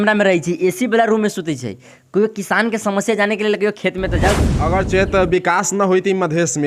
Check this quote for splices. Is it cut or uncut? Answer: cut